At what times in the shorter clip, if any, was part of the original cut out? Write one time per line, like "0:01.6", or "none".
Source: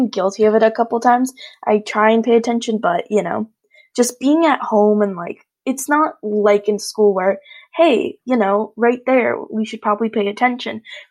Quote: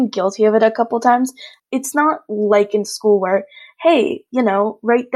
0:01.5